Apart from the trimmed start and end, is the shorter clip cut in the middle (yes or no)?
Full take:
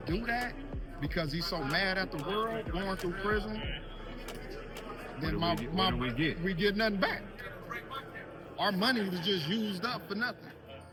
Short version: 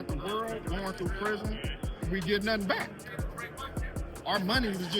yes